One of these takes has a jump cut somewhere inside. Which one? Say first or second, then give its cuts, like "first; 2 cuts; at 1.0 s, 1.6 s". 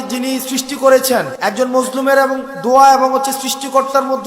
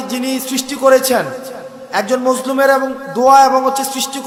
first; 1 cut; at 1.3 s